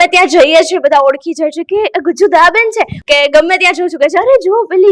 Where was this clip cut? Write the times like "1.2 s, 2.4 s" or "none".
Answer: 3.0 s

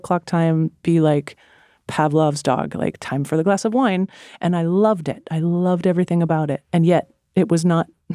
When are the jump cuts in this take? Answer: 6.6 s

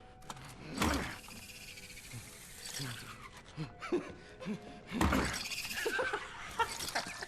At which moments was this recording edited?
1.0 s

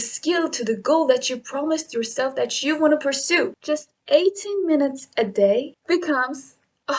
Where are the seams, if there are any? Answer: 3.6 s, 5.8 s

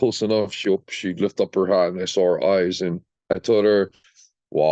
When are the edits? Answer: 3.1 s

